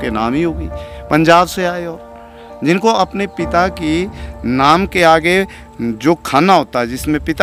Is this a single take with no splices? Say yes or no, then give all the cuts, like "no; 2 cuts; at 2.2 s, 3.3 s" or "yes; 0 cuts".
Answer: yes; 0 cuts